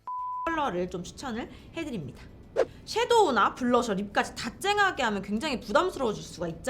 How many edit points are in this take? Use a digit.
1